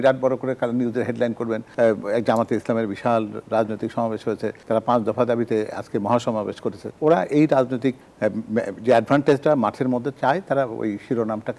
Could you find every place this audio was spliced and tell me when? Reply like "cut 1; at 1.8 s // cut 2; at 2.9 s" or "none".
none